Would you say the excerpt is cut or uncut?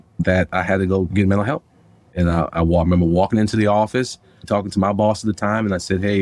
uncut